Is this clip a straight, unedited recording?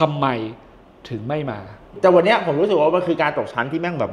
no; 1 cut; at 1.9 s

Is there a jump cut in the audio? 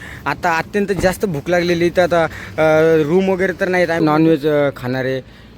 yes; 1 cut; at 4.0 s

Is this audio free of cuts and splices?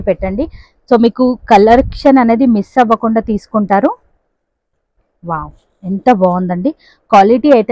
yes; 0 cuts

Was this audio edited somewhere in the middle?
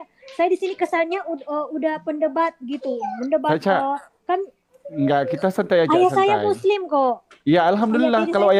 no; 0 cuts

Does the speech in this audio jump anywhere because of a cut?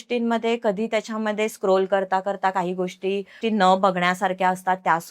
yes; 1 cut; at 3.4 s

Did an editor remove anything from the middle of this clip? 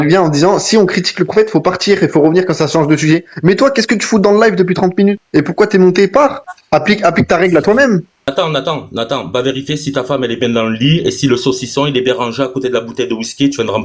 yes; 3 cuts; at 5.2 s, 6.5 s, 8.3 s

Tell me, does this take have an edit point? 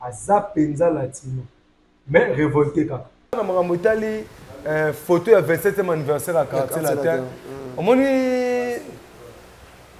yes; 1 cut; at 3.4 s

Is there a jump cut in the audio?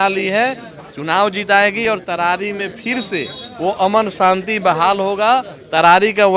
no; 0 cuts

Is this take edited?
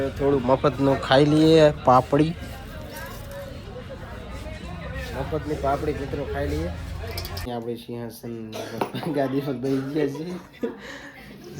yes; 1 cut; at 7.5 s

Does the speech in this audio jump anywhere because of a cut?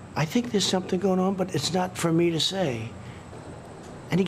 yes; 1 cut; at 3.2 s

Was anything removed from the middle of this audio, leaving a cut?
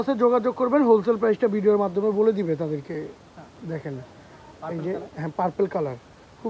no; 0 cuts

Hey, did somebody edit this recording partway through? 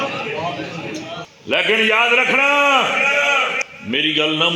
yes; 2 cuts; at 1.3 s, 3.6 s

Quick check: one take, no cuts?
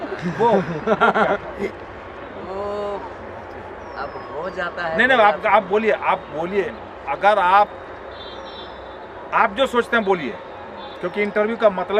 yes; 0 cuts

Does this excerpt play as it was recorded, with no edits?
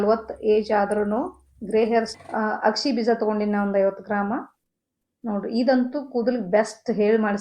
no; 1 cut; at 2.1 s

